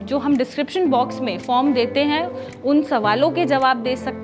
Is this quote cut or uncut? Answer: uncut